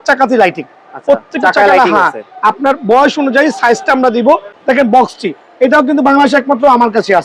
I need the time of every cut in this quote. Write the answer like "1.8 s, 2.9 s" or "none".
4.5 s